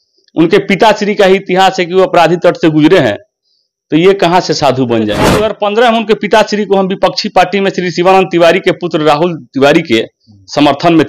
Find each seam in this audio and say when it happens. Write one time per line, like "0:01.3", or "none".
0:05.3